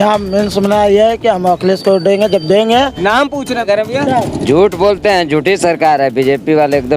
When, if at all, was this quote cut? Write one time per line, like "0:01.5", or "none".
0:03.7